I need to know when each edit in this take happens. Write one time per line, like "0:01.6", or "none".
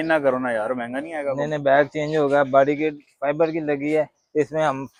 none